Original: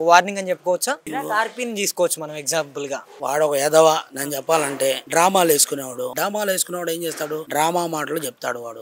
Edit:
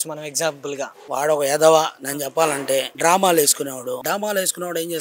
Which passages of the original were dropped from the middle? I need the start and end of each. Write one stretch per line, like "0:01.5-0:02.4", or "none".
none